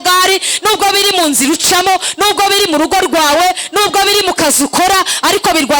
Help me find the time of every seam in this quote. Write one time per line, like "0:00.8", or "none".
none